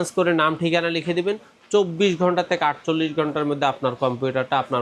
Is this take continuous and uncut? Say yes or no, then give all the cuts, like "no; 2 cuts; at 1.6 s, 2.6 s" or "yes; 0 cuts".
yes; 0 cuts